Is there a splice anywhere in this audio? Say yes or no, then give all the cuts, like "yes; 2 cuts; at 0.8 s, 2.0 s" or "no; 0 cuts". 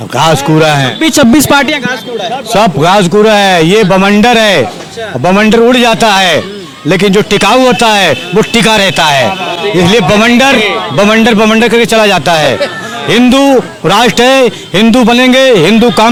no; 0 cuts